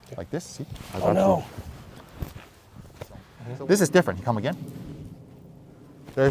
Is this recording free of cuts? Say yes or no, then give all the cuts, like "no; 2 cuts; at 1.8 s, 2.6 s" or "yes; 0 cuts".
no; 1 cut; at 3.4 s